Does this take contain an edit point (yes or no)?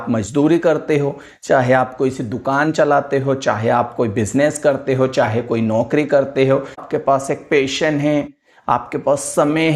yes